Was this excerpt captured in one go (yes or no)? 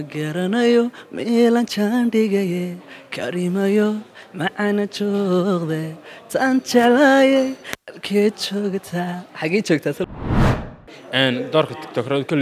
no